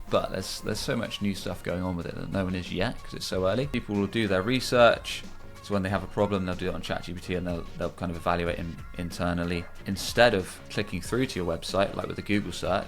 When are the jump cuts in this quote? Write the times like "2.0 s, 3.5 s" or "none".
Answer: 3.7 s, 9.7 s